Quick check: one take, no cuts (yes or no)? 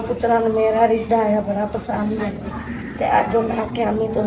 yes